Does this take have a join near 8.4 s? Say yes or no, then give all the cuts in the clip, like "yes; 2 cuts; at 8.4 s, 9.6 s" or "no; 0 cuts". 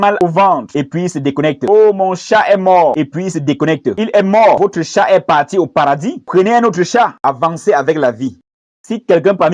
yes; 2 cuts; at 7.2 s, 8.4 s